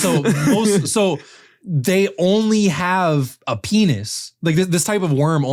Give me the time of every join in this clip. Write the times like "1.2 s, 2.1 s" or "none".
none